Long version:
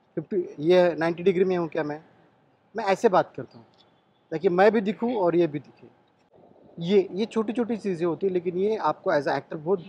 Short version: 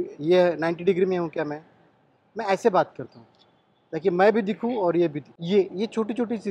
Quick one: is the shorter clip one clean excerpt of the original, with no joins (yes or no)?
no